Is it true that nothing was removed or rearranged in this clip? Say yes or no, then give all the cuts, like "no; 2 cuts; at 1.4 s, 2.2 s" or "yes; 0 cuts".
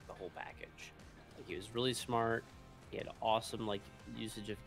yes; 0 cuts